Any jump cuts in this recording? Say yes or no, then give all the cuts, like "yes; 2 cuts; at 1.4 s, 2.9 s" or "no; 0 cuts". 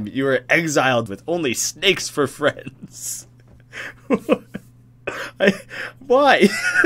yes; 1 cut; at 1.1 s